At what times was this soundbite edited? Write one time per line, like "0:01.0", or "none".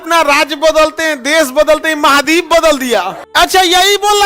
0:03.2